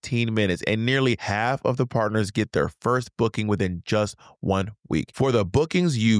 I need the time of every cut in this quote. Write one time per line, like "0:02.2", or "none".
0:01.2
0:05.1